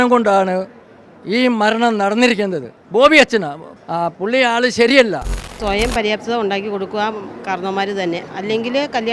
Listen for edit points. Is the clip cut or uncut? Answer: cut